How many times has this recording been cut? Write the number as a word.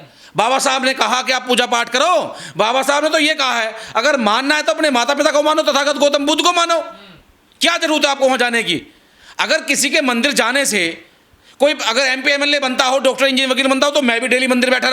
zero